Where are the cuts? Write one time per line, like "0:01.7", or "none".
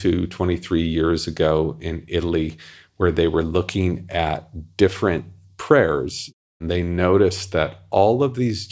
0:06.6